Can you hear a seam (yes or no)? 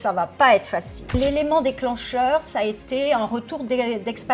yes